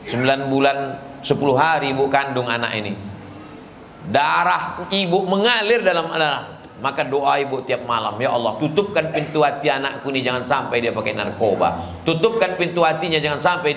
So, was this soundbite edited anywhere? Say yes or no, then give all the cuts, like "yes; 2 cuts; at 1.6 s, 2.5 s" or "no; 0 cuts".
no; 0 cuts